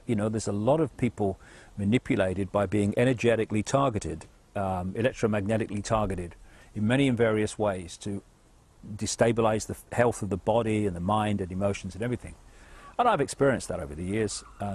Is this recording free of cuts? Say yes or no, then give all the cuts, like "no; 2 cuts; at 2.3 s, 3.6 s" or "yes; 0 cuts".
yes; 0 cuts